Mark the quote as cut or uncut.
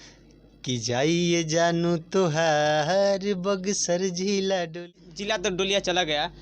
cut